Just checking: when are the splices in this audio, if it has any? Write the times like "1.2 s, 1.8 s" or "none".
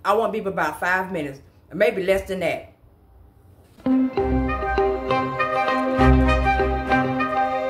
3.9 s